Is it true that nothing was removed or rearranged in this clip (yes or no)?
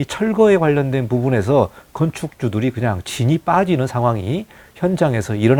yes